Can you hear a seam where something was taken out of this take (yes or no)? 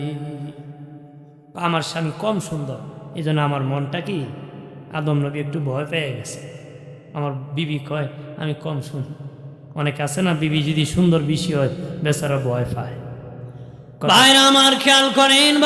yes